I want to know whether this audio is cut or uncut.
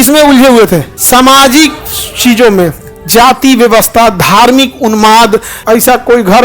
cut